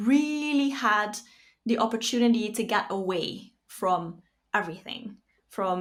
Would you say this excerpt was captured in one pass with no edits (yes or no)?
yes